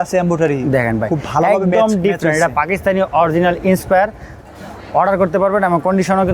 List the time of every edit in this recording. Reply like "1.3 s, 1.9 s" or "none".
4.5 s